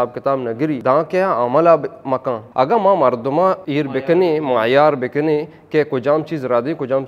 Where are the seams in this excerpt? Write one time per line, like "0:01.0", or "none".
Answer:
0:00.8
0:02.4
0:03.6